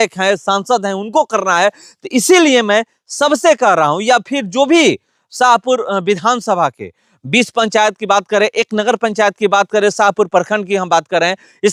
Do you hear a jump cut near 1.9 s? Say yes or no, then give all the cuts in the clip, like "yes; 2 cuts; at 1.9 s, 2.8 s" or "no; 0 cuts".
no; 0 cuts